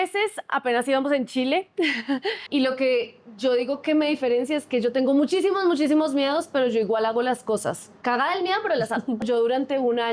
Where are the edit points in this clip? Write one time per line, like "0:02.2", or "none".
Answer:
0:02.4
0:07.9
0:09.2